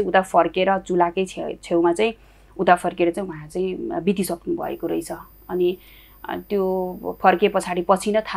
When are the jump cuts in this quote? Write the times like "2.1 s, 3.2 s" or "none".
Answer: none